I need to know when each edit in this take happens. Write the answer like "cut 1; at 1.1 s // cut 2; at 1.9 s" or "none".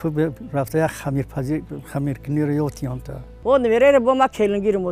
cut 1; at 3.4 s